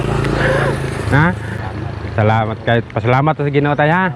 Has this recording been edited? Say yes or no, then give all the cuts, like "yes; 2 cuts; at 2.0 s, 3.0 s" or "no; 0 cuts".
yes; 1 cut; at 1.5 s